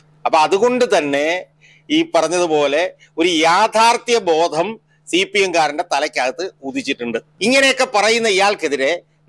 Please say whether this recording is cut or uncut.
cut